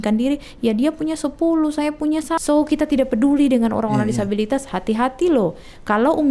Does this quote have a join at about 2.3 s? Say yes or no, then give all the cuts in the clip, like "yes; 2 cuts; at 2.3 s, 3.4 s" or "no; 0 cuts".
yes; 1 cut; at 2.3 s